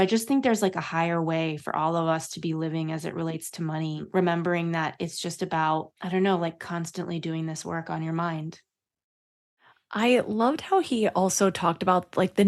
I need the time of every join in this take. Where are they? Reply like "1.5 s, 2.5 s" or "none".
none